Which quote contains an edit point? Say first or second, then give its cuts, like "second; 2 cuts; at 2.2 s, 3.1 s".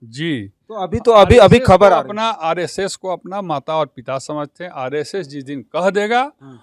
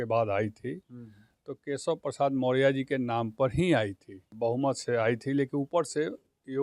second; 1 cut; at 4.2 s